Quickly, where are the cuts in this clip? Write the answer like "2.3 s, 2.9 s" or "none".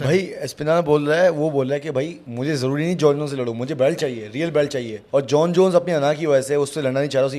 2.2 s, 5.0 s